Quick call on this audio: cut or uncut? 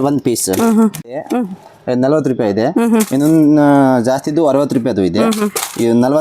cut